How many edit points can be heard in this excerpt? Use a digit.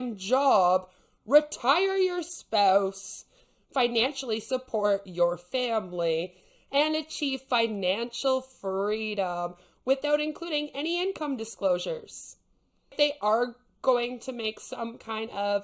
0